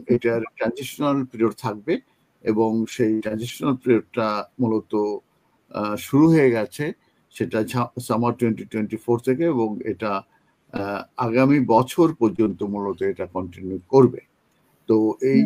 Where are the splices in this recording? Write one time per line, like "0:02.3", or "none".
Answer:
none